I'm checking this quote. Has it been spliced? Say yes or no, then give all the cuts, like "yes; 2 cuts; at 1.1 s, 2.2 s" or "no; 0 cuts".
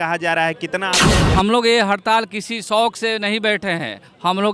yes; 1 cut; at 1.1 s